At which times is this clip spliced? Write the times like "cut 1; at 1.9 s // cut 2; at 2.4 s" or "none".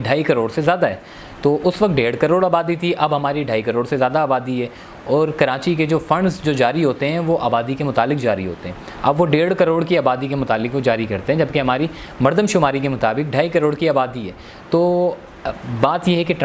none